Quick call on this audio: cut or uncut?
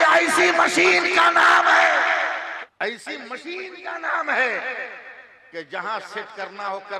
cut